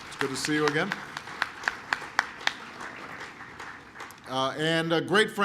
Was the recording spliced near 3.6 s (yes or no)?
yes